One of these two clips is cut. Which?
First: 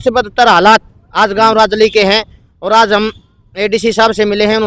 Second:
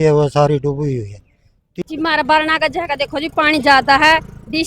second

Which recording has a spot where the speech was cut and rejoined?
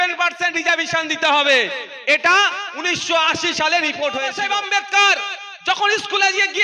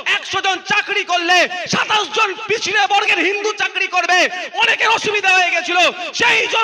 first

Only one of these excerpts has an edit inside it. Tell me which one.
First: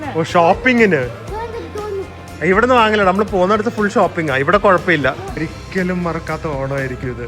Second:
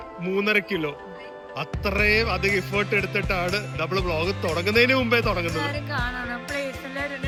first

